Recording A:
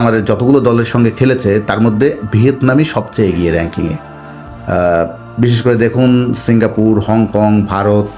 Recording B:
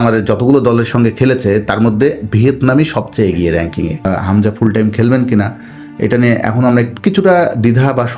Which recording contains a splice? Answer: B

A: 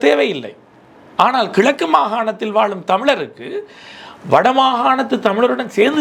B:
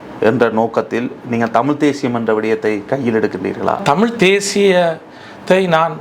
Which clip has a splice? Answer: B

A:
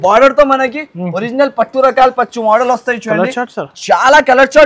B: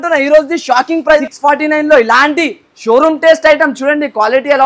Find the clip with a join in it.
B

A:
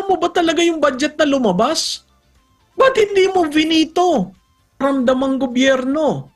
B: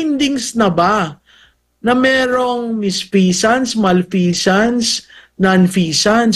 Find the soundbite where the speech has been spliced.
A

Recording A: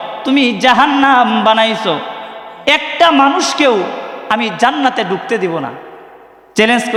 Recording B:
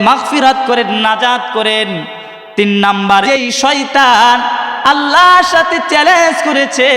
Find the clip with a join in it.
B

